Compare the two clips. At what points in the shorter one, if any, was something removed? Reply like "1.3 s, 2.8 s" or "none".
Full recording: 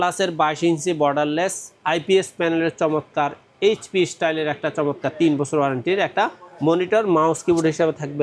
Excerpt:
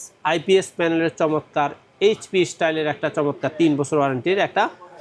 none